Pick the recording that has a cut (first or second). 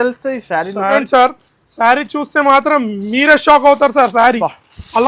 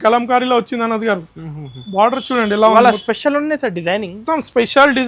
first